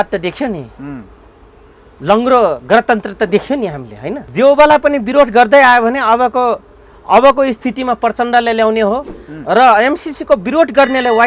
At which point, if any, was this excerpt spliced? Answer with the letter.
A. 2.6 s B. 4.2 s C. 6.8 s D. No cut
B